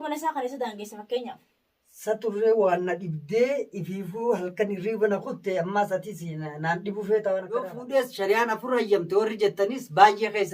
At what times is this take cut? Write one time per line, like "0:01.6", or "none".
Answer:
0:07.8